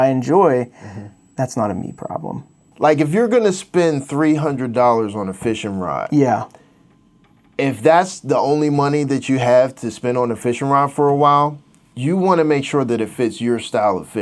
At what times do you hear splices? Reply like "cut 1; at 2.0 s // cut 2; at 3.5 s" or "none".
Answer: cut 1; at 2.7 s